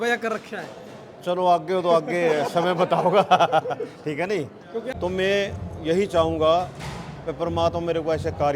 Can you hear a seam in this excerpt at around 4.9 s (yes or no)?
yes